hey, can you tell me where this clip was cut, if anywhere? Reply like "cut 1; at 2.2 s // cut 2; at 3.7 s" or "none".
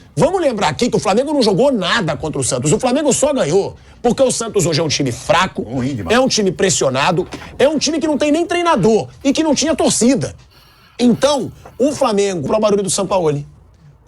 cut 1; at 12.5 s